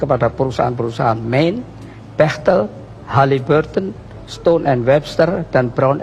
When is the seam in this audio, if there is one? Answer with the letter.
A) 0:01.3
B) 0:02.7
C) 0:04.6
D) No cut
D